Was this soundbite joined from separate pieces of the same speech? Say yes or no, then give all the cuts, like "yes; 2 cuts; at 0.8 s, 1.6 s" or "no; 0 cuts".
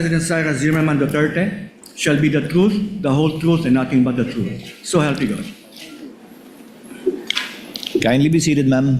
no; 0 cuts